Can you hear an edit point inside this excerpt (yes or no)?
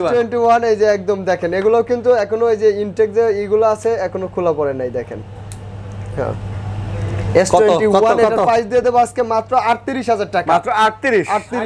no